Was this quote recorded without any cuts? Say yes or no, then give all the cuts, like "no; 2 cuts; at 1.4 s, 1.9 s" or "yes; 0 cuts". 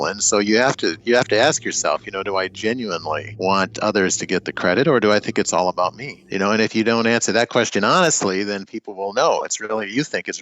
no; 2 cuts; at 3.3 s, 6.2 s